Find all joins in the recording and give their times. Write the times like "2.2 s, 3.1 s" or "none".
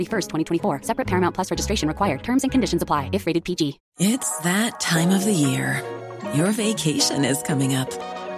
3.8 s

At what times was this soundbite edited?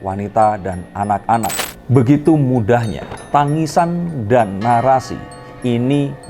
1.5 s

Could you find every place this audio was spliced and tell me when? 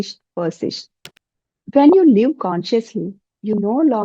1.0 s

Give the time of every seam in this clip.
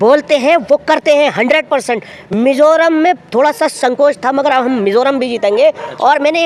none

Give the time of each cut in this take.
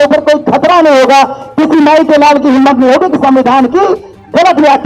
none

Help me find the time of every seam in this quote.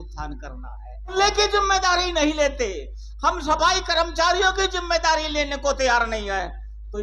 1.1 s

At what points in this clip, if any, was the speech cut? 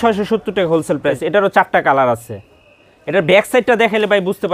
1.2 s

